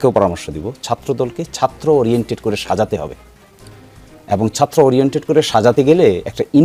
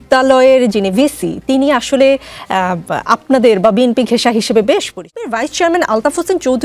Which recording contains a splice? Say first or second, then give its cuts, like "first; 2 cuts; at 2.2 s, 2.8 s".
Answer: second; 1 cut; at 5.3 s